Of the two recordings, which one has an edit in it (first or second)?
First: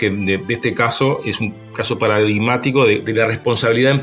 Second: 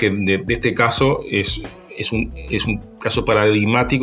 first